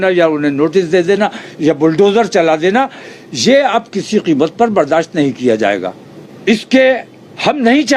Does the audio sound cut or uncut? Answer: uncut